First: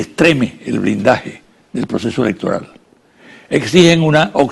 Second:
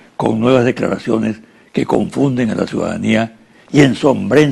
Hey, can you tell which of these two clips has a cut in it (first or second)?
second